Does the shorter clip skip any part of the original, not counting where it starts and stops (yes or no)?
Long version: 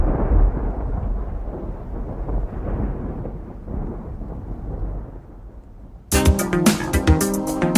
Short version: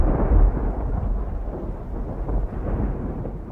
no